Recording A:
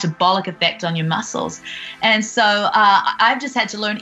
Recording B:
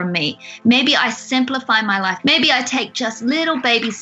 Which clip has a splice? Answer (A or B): B